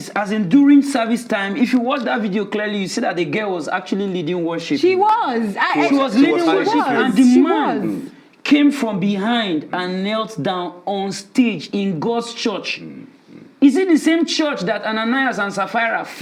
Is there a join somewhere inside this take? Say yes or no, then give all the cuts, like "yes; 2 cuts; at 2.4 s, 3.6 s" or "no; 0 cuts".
no; 0 cuts